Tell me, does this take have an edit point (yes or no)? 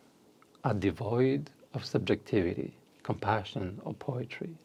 no